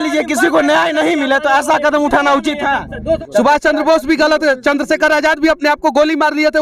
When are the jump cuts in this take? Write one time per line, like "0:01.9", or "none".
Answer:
0:03.2

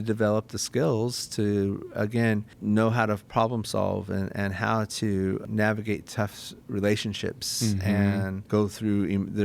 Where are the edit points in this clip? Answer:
0:02.5
0:05.4
0:08.4

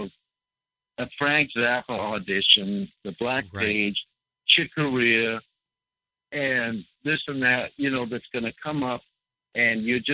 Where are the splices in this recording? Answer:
none

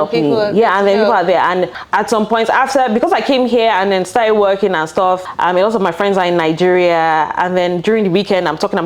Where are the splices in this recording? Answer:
0:01.8
0:05.3

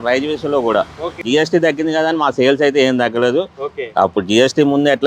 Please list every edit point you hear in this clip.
0:01.2

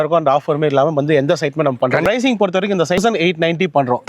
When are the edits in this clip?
0:02.0
0:03.0

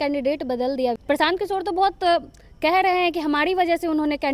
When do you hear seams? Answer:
0:01.0

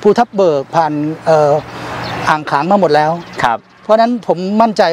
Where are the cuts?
none

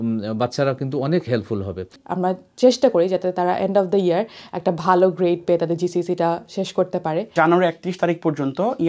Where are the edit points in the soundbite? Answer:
0:01.9
0:07.3

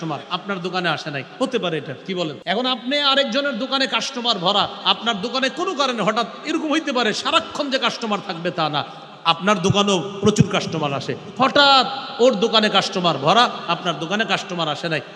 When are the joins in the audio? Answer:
0:02.4

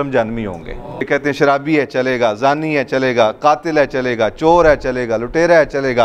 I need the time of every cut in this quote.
0:01.0

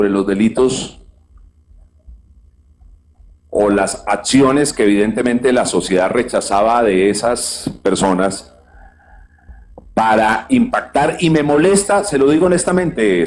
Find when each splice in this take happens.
none

